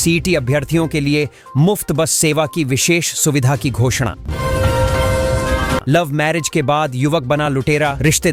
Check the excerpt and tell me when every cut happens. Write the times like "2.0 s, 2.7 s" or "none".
4.2 s, 5.8 s

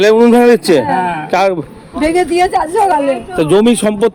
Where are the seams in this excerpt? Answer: none

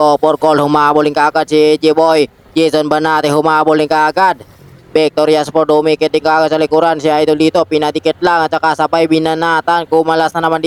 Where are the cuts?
none

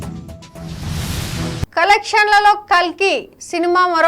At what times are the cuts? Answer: 1.7 s

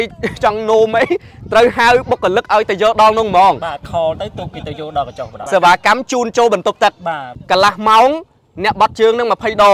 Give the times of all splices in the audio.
5.3 s, 7.3 s

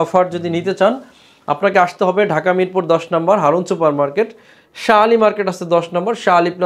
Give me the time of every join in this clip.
none

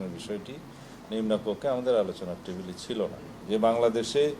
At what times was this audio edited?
3.3 s

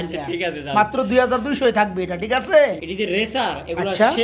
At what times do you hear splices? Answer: 2.8 s

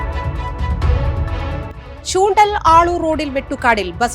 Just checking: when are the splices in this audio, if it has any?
1.7 s

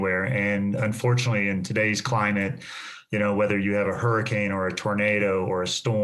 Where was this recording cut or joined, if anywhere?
none

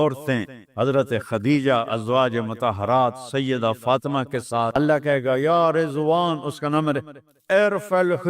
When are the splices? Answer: 4.7 s

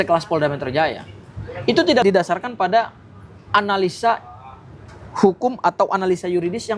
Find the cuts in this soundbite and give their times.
none

